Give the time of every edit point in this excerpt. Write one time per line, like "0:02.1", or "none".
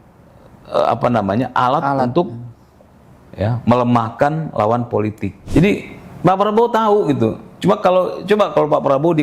0:05.3